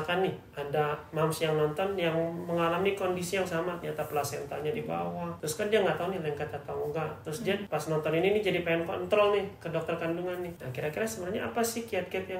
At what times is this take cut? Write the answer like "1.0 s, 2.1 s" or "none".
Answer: 5.4 s, 7.6 s, 10.6 s

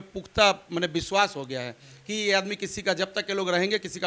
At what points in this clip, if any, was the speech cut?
none

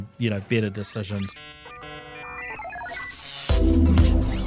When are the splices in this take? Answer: 1.4 s

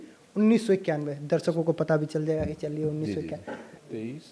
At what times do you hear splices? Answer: none

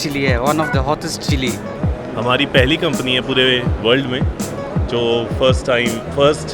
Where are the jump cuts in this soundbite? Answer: 1.8 s

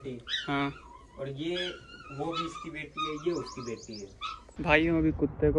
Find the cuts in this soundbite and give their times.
4.5 s

